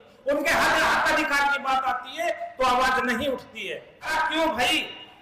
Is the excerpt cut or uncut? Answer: cut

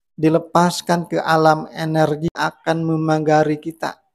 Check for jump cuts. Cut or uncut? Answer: cut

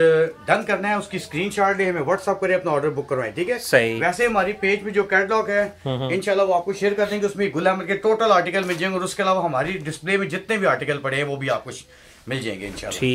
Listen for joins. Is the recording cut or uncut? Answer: uncut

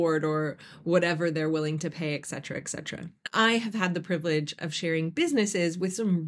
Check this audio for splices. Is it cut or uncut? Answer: cut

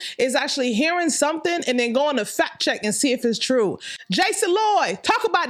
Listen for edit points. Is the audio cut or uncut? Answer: cut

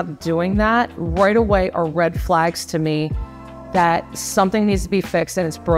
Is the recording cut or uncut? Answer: uncut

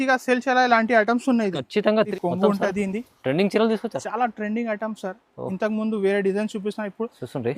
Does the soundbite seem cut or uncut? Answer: cut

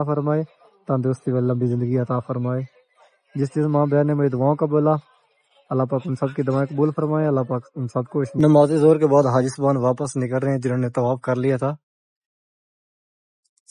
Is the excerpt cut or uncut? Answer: cut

